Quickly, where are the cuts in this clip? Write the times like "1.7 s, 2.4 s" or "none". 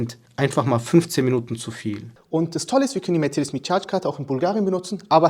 2.1 s